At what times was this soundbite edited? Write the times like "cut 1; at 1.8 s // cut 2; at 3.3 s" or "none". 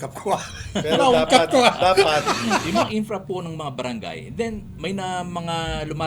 cut 1; at 2.9 s